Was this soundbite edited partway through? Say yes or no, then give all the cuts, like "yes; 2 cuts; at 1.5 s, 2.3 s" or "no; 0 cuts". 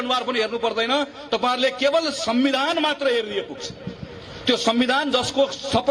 no; 0 cuts